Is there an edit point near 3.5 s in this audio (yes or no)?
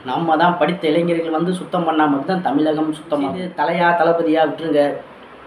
yes